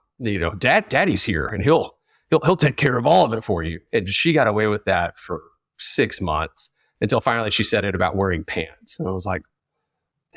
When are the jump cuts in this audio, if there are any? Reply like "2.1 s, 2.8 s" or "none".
none